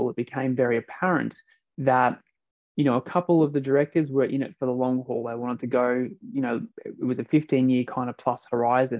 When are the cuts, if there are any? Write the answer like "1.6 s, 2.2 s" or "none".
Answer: 6.7 s